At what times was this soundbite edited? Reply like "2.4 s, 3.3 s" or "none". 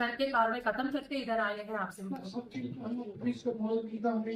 2.2 s